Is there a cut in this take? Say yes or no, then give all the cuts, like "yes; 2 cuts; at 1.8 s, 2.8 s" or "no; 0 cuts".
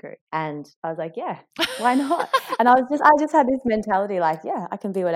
no; 0 cuts